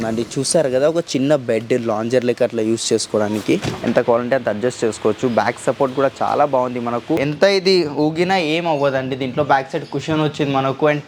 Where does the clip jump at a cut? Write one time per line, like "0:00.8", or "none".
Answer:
0:03.7
0:07.2